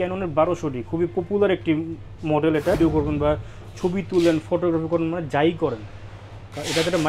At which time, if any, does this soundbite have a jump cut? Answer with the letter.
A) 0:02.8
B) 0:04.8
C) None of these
A